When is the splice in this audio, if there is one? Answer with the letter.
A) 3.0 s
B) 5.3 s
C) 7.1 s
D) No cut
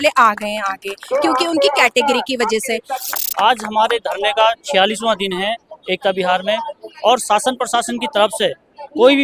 A